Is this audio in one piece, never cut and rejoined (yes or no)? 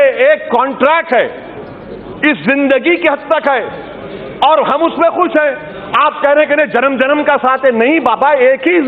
yes